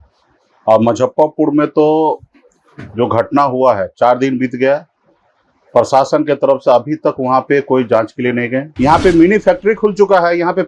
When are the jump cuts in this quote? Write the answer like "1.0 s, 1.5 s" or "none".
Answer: 8.6 s